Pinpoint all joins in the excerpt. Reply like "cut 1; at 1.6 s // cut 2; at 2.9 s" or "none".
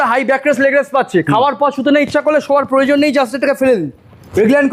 none